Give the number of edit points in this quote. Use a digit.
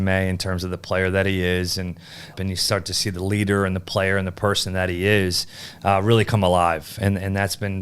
1